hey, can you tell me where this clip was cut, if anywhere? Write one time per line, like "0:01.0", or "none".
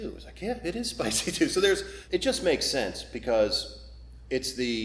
0:01.9

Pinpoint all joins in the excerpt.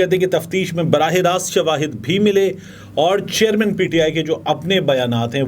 none

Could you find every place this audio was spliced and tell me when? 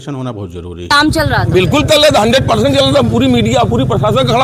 0:00.9

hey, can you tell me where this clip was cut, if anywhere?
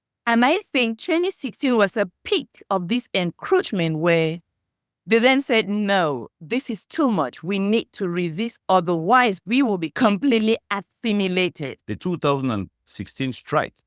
0:11.8

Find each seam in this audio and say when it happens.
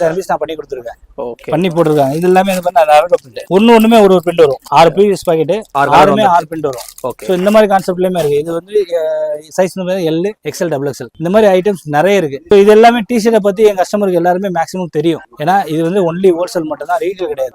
none

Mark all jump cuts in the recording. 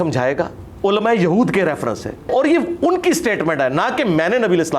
0:02.3

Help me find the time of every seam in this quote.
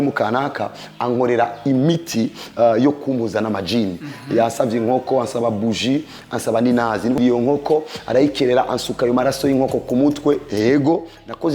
0:07.2

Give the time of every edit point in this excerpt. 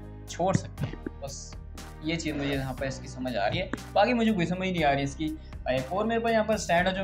none

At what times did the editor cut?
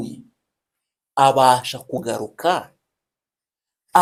none

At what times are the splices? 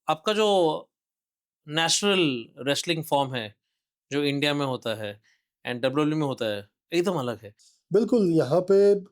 0:07.5

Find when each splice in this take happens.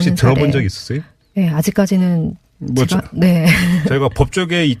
none

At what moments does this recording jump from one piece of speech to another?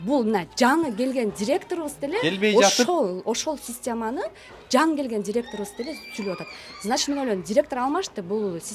none

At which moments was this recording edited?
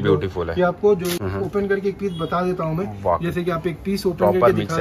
0:01.2

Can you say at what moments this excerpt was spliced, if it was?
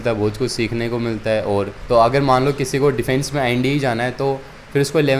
0:01.8

